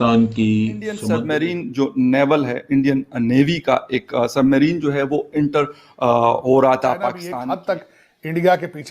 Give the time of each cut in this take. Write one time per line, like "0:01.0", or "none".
0:01.0
0:07.2